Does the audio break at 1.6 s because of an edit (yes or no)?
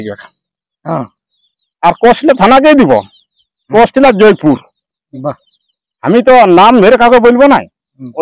no